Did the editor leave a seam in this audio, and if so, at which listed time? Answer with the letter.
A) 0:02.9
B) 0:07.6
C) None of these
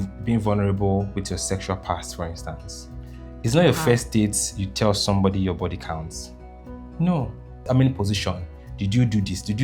B